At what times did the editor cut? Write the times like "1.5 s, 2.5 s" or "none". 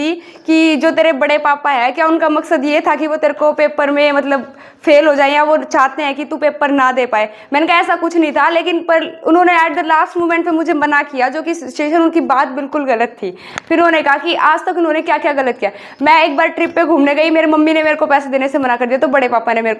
none